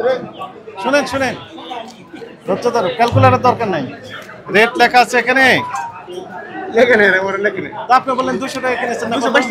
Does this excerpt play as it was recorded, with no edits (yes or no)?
yes